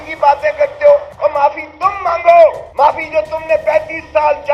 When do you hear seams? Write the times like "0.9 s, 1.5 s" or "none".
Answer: 1.1 s, 2.6 s